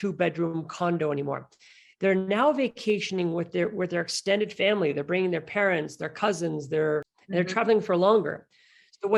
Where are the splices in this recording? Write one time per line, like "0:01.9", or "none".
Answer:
0:07.2